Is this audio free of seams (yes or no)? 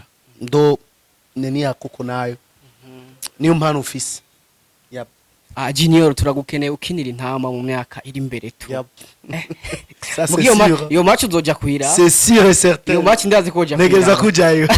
yes